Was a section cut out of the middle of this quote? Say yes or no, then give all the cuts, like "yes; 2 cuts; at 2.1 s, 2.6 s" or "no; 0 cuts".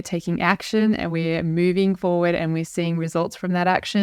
no; 0 cuts